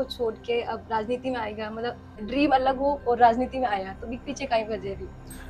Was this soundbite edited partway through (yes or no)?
yes